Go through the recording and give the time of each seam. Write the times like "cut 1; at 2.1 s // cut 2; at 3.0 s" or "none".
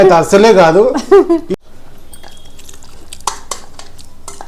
cut 1; at 1.6 s